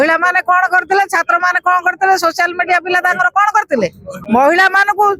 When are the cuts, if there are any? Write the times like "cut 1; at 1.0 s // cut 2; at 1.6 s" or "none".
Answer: cut 1; at 4.1 s

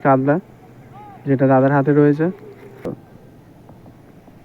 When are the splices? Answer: cut 1; at 3.0 s

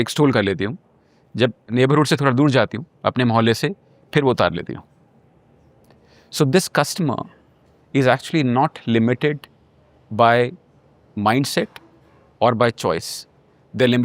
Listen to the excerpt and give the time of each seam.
cut 1; at 1.6 s

